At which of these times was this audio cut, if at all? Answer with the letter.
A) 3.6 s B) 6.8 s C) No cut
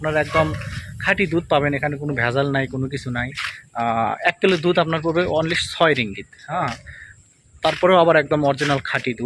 C